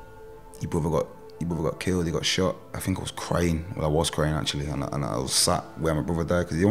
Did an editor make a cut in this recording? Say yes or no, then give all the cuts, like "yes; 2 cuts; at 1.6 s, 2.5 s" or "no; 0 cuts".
yes; 1 cut; at 2.7 s